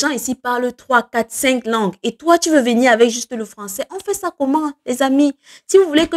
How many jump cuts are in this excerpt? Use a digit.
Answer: 0